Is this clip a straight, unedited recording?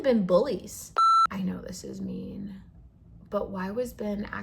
no; 1 cut; at 1.1 s

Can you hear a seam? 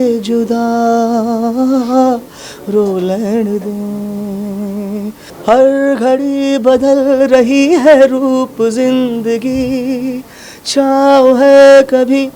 yes; 1 cut; at 5.3 s

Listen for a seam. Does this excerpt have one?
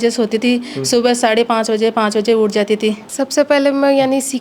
yes; 1 cut; at 3.1 s

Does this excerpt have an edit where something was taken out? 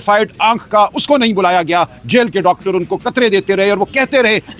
no; 0 cuts

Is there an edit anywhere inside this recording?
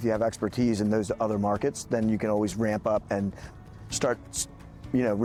no; 0 cuts

